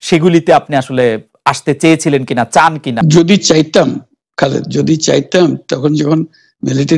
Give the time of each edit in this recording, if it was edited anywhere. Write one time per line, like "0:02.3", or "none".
0:03.0